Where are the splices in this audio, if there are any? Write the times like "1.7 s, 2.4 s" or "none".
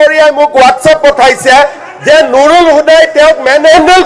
none